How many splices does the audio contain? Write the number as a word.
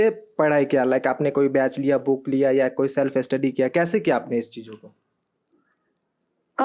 zero